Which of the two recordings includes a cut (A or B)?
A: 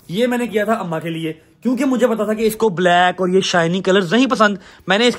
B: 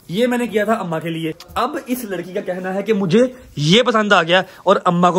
B